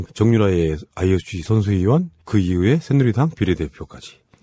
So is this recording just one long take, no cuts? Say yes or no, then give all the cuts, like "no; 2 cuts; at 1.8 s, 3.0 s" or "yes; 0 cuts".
yes; 0 cuts